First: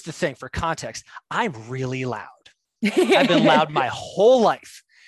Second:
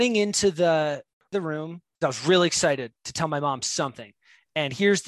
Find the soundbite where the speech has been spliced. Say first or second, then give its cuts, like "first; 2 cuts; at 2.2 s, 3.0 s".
second; 1 cut; at 1.3 s